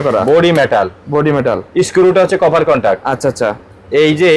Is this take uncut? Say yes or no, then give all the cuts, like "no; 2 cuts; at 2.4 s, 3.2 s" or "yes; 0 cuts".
yes; 0 cuts